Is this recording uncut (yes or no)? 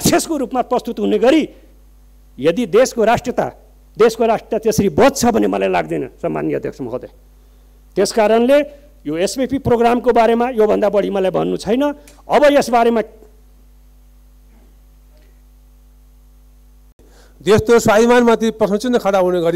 yes